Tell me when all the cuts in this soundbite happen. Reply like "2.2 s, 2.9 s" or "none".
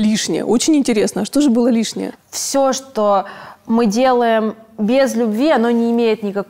2.1 s